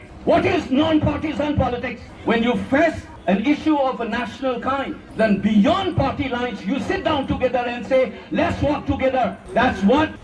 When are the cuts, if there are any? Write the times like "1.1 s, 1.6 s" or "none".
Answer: none

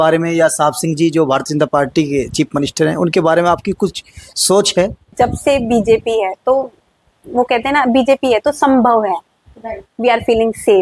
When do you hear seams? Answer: 5.0 s

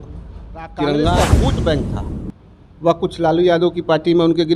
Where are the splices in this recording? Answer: 1.2 s

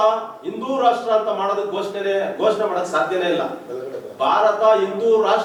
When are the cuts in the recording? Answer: none

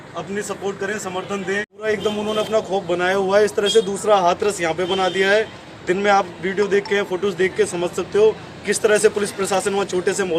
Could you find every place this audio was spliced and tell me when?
1.9 s

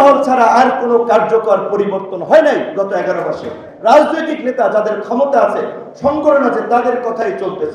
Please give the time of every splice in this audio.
none

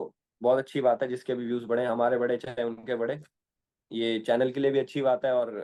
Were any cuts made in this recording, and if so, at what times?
none

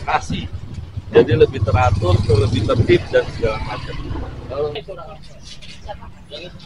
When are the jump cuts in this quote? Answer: 4.8 s

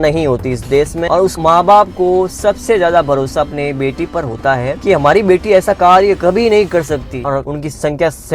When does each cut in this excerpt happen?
1.1 s, 7.2 s

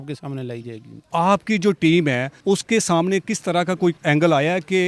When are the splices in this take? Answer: 1.0 s, 2.3 s, 4.0 s

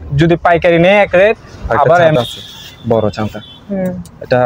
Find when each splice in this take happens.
2.1 s

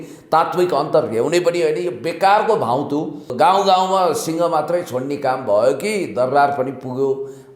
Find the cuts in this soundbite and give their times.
3.3 s

